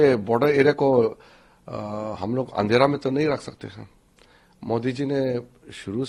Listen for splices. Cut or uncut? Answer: uncut